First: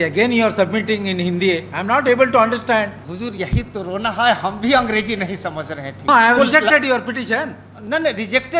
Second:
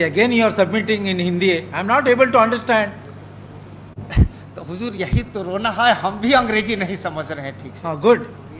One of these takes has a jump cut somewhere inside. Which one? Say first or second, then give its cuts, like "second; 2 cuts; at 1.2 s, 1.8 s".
first; 2 cuts; at 3.0 s, 6.1 s